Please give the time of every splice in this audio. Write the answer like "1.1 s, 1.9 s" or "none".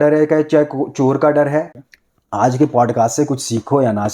1.8 s